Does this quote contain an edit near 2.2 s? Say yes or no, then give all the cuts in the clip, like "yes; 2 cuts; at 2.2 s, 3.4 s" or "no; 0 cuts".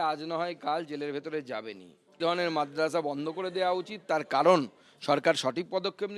yes; 1 cut; at 2.2 s